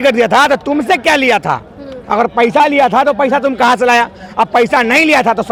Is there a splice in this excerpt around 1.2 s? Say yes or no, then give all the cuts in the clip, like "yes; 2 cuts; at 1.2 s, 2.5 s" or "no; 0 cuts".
no; 0 cuts